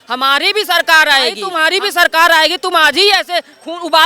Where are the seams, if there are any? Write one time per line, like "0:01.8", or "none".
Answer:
0:01.4